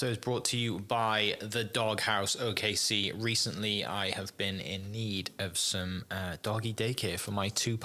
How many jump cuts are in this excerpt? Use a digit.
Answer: 0